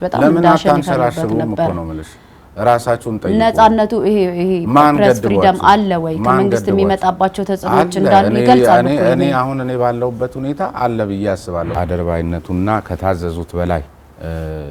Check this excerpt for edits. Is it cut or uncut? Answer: cut